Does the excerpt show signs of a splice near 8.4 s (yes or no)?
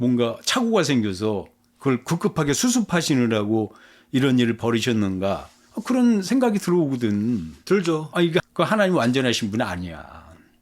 yes